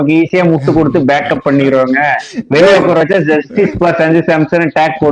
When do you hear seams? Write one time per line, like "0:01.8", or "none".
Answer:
none